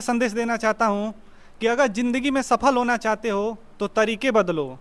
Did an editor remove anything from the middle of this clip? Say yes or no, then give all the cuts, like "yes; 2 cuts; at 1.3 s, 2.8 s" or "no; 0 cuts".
no; 0 cuts